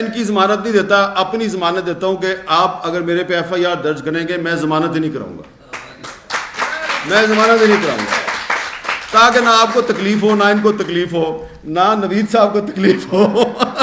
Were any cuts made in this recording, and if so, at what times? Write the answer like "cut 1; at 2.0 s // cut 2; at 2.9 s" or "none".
none